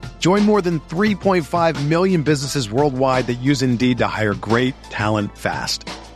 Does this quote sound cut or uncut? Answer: uncut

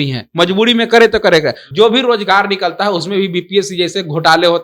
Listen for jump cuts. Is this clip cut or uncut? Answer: cut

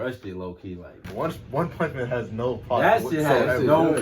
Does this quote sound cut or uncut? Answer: cut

